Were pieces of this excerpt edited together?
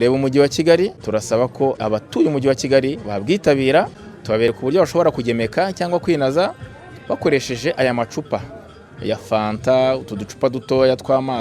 yes; 3 cuts; at 1.0 s, 1.8 s, 4.5 s

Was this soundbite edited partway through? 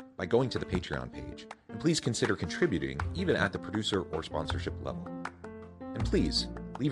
no; 0 cuts

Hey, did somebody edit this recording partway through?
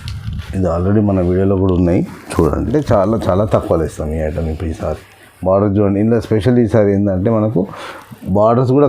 yes; 1 cut; at 2.7 s

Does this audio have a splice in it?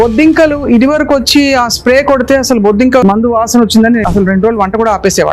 yes; 2 cuts; at 3.0 s, 4.0 s

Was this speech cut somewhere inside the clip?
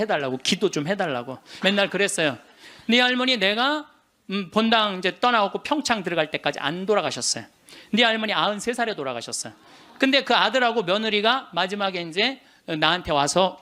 yes; 1 cut; at 1.4 s

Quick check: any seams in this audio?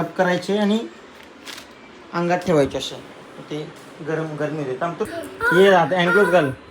yes; 1 cut; at 5.1 s

